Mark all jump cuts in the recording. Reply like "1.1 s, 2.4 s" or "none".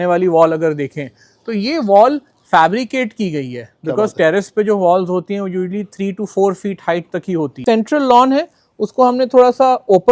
7.6 s

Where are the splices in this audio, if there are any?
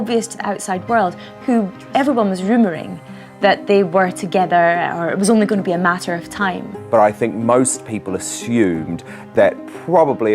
none

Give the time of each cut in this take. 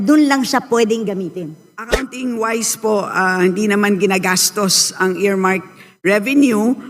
2.1 s

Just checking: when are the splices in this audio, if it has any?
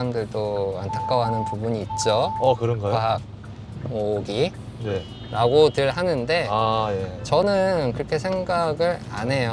none

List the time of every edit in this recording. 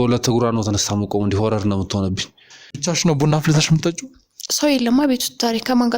2.7 s

